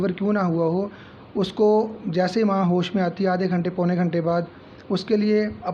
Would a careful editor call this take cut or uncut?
uncut